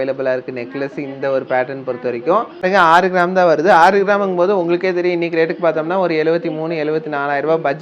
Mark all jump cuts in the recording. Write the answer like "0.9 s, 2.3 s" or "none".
none